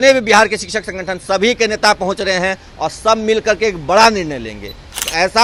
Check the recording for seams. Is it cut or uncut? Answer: uncut